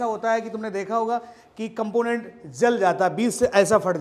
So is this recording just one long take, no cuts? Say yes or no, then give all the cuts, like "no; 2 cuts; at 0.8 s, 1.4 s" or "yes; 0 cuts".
yes; 0 cuts